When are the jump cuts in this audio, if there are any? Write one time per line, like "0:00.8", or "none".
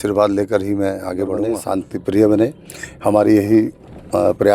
0:01.6